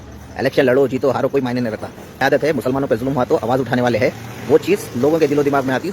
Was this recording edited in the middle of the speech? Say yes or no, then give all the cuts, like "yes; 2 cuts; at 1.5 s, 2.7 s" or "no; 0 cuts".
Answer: yes; 1 cut; at 2.3 s